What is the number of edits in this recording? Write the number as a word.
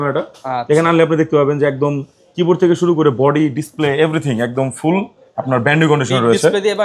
zero